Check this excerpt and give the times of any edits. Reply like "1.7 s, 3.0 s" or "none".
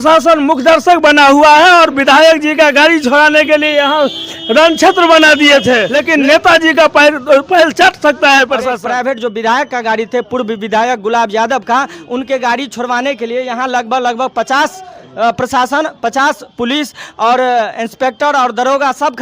5.9 s, 8.7 s